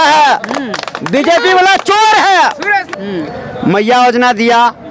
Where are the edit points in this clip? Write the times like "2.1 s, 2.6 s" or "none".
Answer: 2.9 s